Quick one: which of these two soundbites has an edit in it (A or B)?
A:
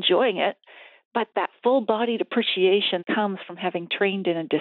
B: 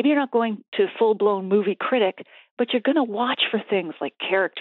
A